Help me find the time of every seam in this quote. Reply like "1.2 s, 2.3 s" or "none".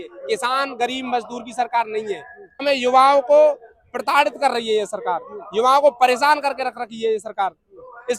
2.6 s